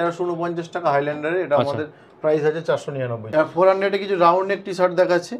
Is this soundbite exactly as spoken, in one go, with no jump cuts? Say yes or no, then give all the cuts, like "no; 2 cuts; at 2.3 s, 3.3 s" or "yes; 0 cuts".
no; 1 cut; at 3.2 s